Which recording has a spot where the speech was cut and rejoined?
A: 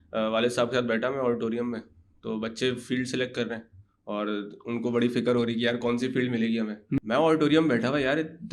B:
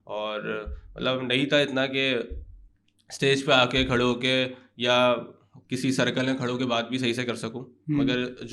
A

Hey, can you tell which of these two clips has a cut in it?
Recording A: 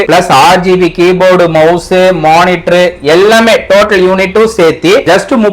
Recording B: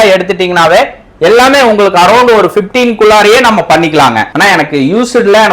B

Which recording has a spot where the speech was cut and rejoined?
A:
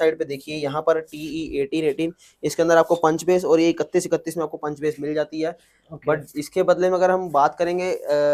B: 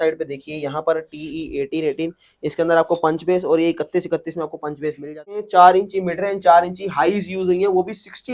B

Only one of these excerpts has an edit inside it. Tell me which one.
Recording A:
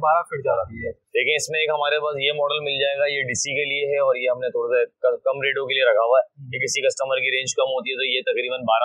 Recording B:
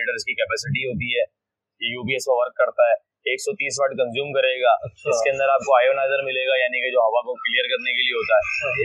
A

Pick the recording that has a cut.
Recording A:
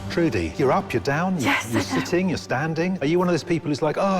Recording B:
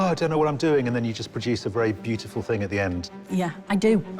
A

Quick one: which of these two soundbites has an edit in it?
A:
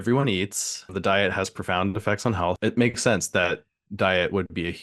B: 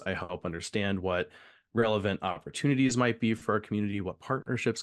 A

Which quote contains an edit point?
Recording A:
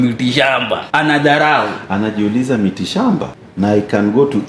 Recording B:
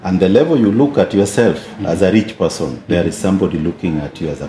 A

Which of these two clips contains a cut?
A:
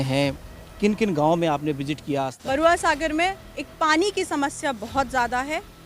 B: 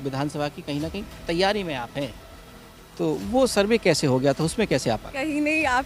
A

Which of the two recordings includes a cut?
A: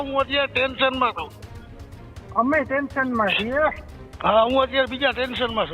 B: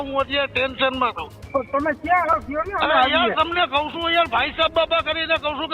B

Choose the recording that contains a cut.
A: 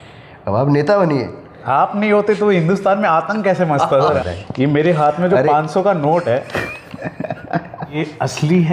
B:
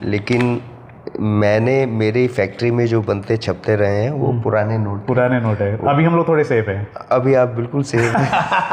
A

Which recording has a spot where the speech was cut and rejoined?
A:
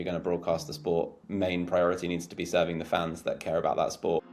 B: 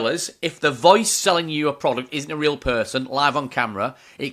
A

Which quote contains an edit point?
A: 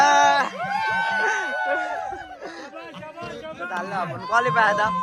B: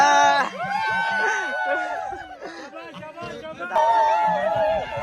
B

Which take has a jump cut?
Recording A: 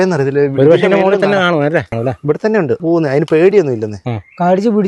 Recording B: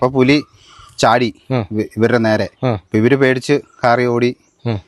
A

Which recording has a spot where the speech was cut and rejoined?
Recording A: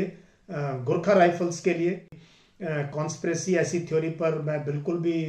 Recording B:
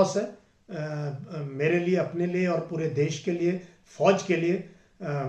A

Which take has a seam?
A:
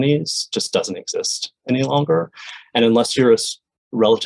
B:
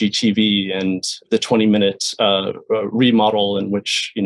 B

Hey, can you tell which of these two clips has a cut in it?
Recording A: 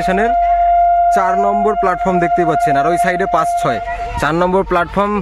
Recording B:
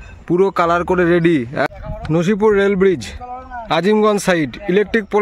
B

